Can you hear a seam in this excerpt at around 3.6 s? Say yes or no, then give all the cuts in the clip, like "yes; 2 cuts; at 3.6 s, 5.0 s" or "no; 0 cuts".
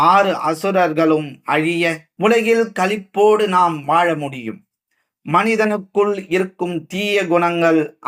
no; 1 cut; at 2.1 s